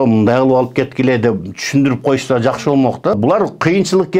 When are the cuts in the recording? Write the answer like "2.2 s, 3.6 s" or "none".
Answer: 3.1 s